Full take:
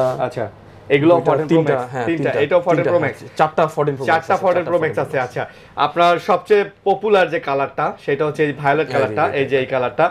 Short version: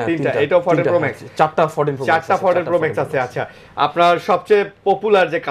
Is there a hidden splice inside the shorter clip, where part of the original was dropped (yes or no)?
no